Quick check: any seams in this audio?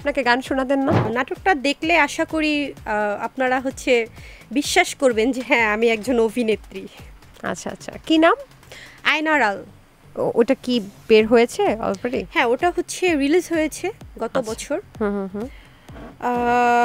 yes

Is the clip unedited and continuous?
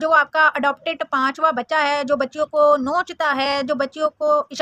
yes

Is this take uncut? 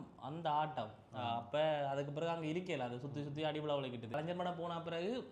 no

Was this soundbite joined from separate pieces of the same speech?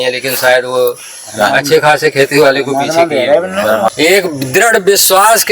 yes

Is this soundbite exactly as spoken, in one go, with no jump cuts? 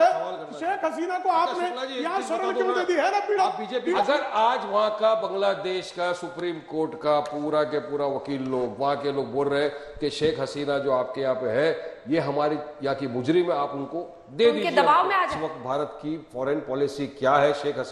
no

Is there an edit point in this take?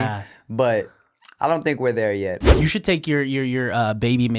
yes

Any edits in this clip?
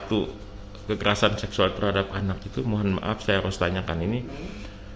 no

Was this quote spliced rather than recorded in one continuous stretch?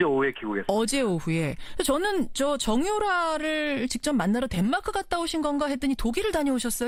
no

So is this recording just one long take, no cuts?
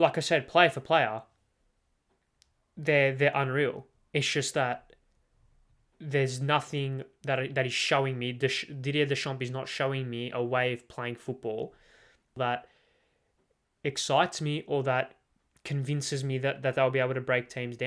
no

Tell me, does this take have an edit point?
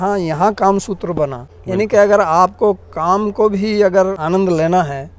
yes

